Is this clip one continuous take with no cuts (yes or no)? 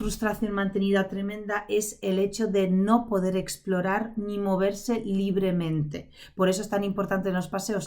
yes